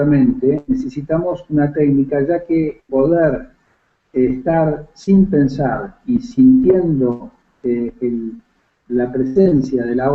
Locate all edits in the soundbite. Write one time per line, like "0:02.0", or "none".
none